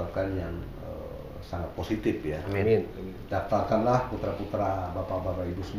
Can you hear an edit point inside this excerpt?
no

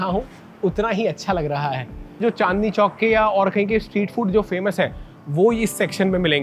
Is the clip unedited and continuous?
no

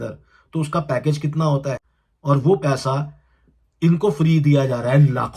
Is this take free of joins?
no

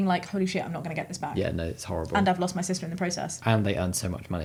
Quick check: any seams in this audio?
no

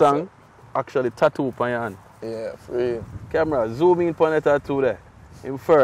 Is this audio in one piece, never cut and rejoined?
yes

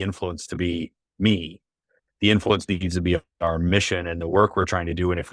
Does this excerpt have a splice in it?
no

